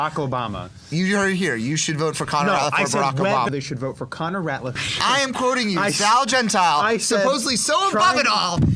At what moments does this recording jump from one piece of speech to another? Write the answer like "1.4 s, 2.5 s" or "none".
3.5 s, 4.8 s

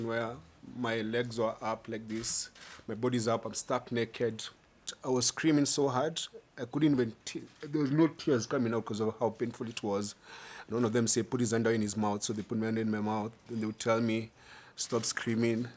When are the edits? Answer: 4.9 s

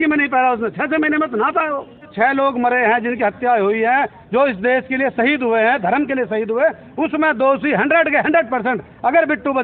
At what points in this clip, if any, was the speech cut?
2.1 s

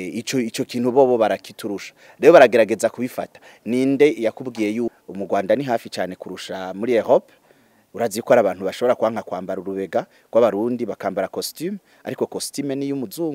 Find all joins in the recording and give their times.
4.9 s

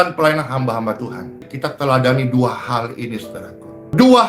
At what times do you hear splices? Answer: 1.5 s

